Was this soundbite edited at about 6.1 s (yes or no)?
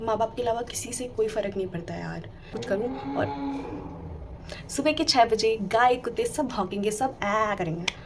no